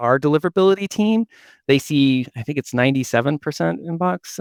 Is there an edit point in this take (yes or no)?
no